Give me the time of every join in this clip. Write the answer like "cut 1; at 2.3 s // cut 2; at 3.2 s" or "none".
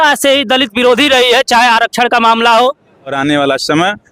cut 1; at 3.2 s

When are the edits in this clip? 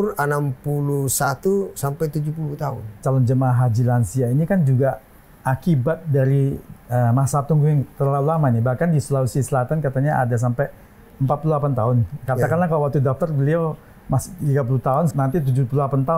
cut 1; at 3.0 s

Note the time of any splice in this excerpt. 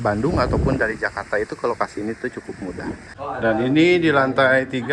cut 1; at 3.1 s

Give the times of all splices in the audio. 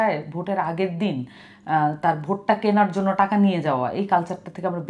none

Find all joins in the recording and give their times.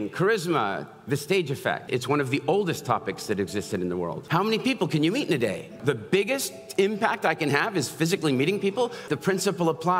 cut 1; at 1.9 s // cut 2; at 4.2 s // cut 3; at 5.8 s // cut 4; at 9.1 s

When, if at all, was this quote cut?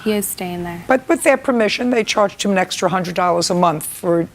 cut 1; at 1.0 s

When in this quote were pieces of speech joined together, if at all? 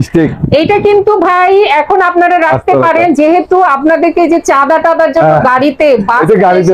none

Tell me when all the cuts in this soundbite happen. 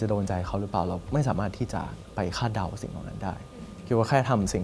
cut 1; at 1.0 s // cut 2; at 2.0 s

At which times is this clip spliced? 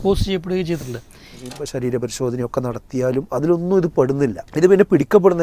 cut 1; at 1.5 s // cut 2; at 4.4 s

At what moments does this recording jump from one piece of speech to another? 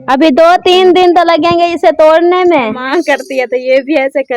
cut 1; at 2.8 s

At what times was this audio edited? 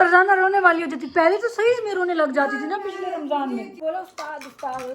cut 1; at 3.8 s

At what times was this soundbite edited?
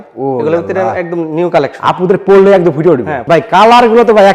cut 1; at 3.1 s

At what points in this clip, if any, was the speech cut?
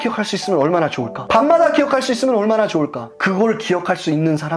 none

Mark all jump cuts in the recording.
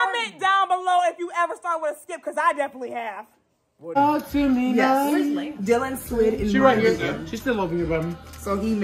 cut 1; at 4.0 s

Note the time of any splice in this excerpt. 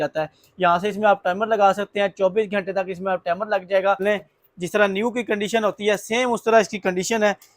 cut 1; at 4.0 s

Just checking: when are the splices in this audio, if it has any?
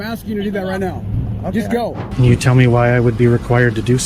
cut 1; at 2.0 s

